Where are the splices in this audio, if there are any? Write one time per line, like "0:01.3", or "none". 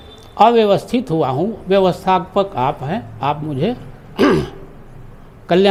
none

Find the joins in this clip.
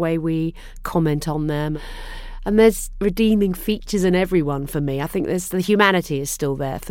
0:01.8
0:02.9

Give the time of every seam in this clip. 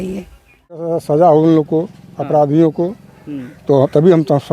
0:00.9

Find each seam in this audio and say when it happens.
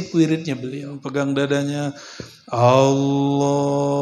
0:00.9

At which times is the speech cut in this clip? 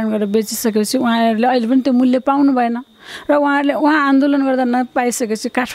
none

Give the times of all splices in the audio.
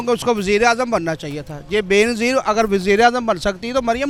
none

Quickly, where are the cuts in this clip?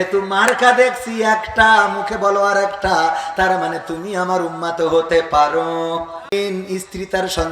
0:06.3

